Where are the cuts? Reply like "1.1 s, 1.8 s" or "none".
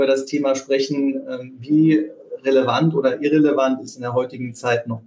none